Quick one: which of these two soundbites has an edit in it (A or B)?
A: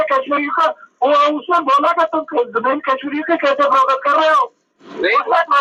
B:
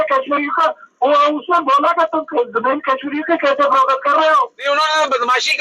B